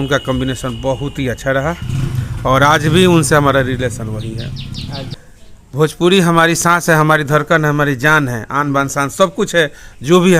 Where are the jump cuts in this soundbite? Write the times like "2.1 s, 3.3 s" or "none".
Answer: 5.1 s